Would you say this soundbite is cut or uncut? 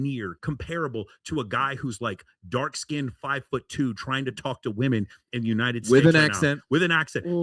uncut